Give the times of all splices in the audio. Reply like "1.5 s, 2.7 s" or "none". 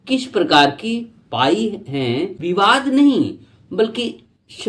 2.4 s